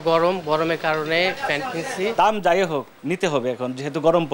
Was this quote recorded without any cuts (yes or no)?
no